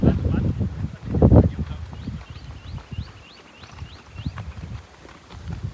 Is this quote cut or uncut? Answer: uncut